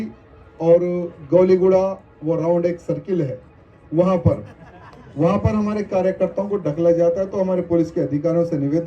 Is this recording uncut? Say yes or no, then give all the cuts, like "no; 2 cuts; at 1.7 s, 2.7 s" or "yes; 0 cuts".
yes; 0 cuts